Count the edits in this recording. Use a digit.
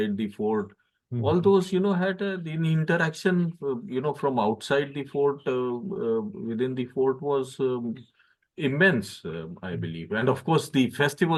0